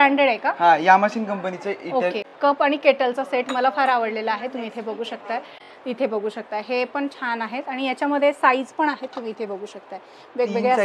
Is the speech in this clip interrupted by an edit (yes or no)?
yes